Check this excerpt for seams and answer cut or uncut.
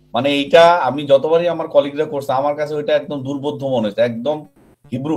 uncut